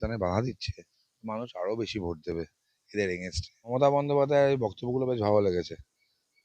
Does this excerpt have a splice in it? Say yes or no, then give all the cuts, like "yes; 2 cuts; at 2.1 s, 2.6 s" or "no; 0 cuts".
yes; 1 cut; at 3.7 s